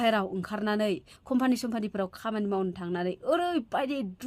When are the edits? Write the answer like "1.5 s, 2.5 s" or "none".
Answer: none